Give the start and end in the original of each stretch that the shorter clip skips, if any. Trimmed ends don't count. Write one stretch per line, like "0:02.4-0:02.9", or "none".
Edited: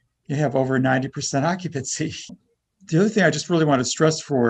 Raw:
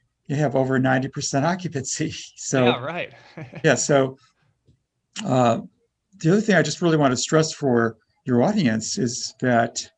0:02.4-0:05.7